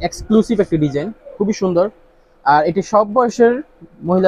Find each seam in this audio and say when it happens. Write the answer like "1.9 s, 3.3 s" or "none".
none